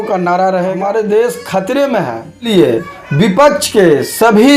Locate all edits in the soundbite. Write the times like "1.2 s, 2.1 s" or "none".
0.8 s, 2.4 s